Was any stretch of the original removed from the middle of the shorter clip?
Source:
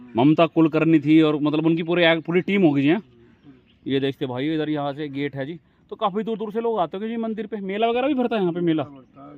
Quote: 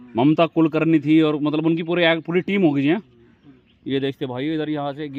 no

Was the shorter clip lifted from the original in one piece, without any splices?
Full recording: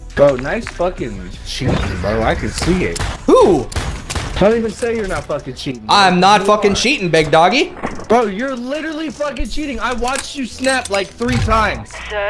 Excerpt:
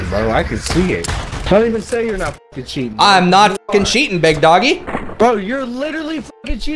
no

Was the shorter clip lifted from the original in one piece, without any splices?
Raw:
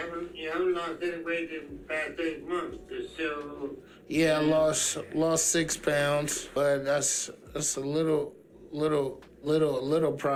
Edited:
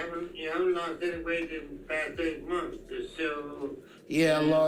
yes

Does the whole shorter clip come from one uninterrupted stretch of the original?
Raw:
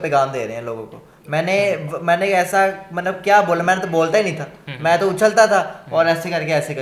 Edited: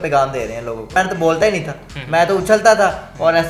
no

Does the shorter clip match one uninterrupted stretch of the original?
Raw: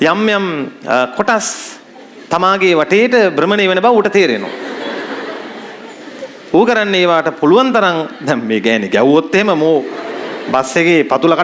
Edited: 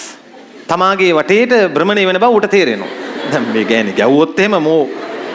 no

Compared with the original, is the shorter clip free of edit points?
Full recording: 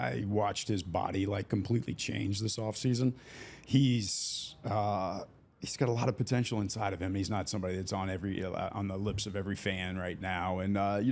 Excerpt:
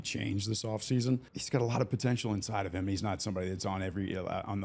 no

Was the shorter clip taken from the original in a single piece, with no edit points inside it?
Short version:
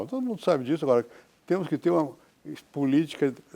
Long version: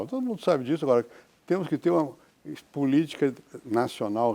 yes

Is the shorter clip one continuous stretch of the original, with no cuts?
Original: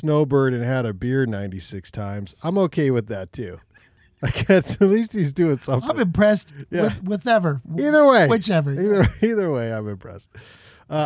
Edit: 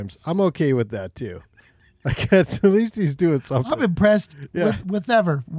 yes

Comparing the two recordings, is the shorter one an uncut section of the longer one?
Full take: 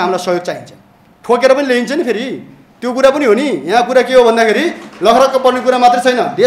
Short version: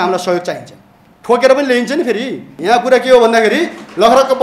no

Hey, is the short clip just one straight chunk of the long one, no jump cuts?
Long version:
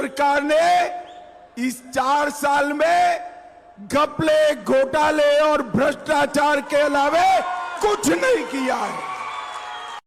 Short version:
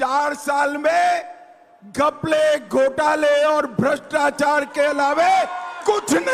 yes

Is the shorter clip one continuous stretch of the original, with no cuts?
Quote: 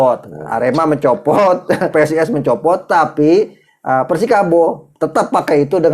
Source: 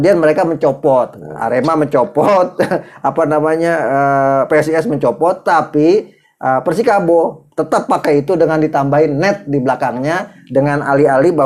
no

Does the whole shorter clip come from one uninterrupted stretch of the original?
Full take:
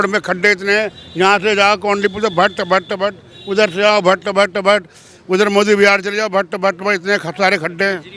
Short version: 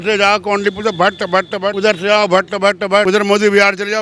no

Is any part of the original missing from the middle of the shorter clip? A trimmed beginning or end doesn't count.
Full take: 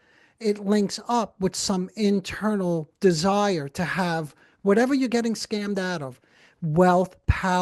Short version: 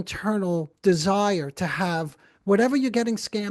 no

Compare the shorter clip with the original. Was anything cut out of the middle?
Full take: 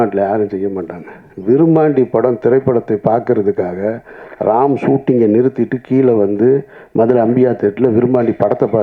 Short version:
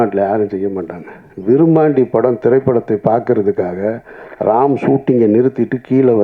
no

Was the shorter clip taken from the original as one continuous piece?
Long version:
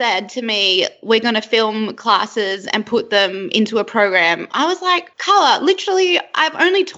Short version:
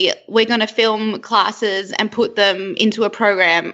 yes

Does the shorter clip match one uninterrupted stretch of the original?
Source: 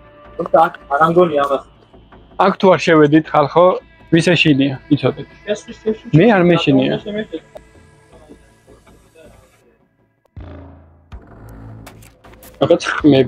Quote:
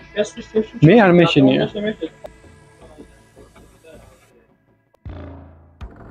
yes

